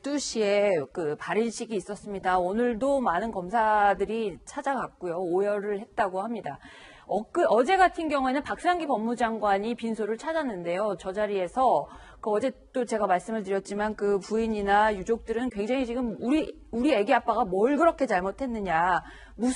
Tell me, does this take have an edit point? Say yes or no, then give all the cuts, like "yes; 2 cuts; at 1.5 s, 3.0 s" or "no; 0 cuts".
no; 0 cuts